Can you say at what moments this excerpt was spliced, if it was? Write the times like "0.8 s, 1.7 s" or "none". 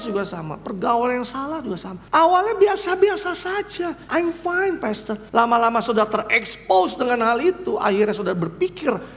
1.9 s, 4.0 s, 5.2 s